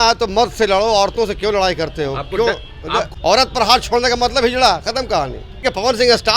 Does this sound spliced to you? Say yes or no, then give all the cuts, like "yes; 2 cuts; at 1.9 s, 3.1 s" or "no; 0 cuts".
yes; 2 cuts; at 3.1 s, 5.5 s